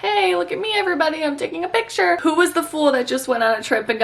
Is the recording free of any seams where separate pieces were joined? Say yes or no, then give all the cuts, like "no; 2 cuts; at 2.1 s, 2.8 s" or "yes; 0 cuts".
no; 1 cut; at 2.2 s